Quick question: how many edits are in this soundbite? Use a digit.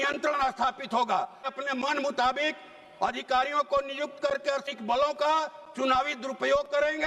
2